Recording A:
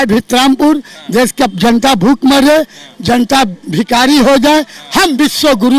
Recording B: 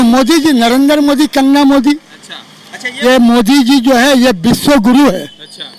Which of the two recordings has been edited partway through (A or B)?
B